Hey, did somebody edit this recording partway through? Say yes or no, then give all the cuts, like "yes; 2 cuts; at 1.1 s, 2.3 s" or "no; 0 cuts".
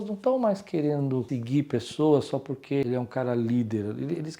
yes; 2 cuts; at 1.3 s, 2.8 s